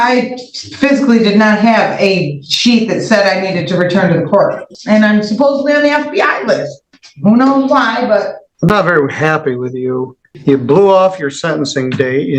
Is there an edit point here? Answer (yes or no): yes